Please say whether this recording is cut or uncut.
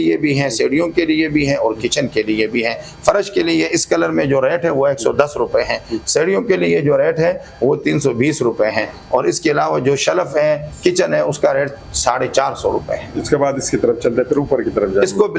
uncut